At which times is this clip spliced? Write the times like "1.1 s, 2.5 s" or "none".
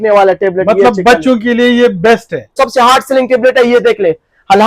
2.5 s